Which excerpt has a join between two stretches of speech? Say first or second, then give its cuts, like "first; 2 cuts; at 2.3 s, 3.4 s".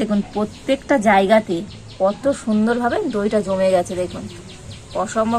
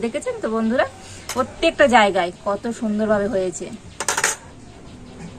second; 2 cuts; at 1.3 s, 4.5 s